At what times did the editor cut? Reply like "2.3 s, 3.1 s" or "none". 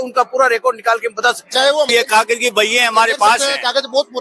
1.9 s